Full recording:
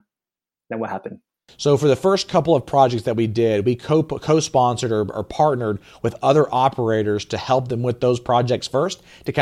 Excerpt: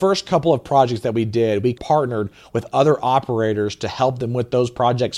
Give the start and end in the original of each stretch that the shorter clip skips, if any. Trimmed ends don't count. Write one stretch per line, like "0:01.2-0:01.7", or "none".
0:03.8-0:05.3